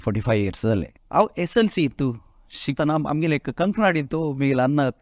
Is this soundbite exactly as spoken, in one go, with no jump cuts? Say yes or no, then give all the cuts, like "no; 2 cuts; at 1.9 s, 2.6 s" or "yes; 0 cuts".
no; 2 cuts; at 1.0 s, 2.8 s